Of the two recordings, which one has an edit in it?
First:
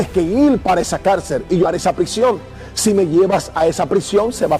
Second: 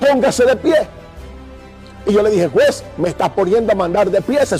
first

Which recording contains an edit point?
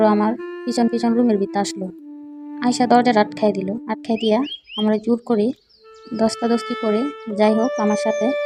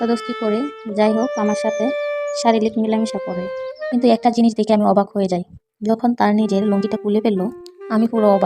second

